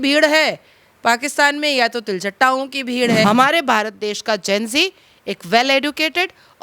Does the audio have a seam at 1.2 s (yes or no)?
no